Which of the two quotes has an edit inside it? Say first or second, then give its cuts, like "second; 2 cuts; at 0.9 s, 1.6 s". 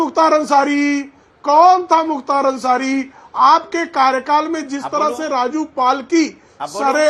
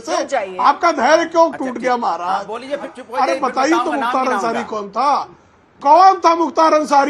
second; 1 cut; at 2.9 s